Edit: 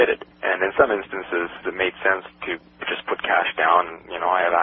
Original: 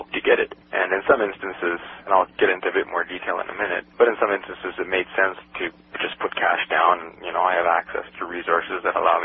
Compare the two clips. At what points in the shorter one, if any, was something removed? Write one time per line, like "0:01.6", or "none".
0:01.6